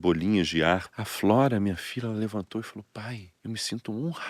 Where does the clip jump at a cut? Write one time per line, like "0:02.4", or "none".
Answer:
0:01.0
0:03.3